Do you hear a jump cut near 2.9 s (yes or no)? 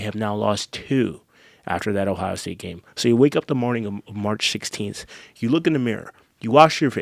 no